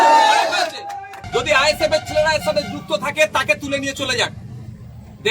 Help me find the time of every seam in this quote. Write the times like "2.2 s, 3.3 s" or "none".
1.2 s